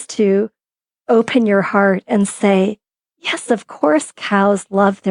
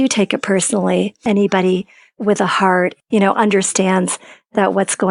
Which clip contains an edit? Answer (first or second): second